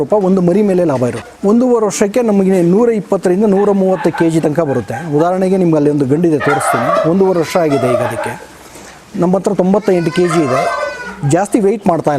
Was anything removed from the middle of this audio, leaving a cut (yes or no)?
yes